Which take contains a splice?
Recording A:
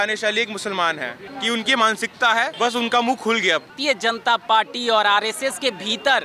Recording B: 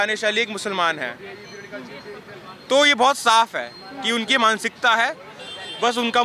A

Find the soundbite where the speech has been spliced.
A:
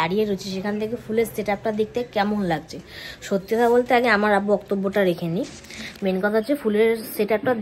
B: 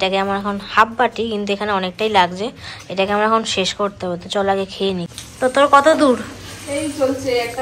B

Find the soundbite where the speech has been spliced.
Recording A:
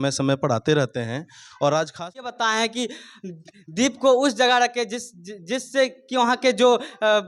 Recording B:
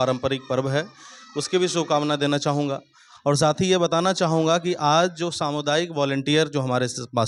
A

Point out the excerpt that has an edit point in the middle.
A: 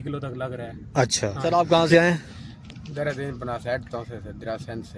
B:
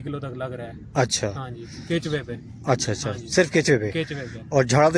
A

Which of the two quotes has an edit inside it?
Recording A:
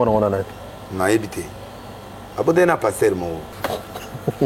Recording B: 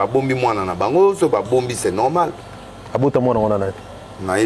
A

